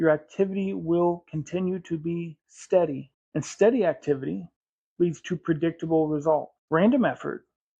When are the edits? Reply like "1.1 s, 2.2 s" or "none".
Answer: 3.1 s, 6.6 s

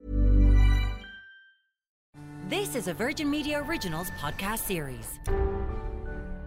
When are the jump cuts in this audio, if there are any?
2.0 s

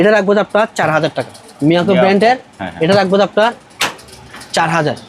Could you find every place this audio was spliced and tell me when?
1.4 s

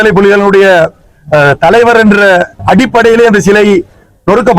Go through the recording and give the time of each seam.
2.6 s

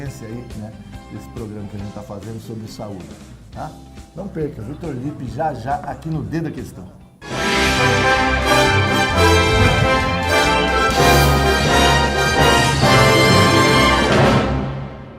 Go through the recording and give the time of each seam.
10.4 s

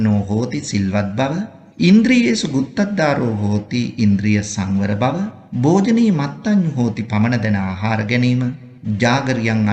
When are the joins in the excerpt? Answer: 1.6 s, 5.4 s, 8.7 s

